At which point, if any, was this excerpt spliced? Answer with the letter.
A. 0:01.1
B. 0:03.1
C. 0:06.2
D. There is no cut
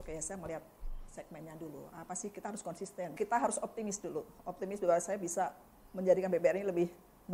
B